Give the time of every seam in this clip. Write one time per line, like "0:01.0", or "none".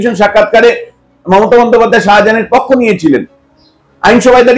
none